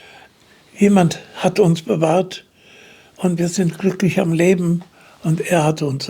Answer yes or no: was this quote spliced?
no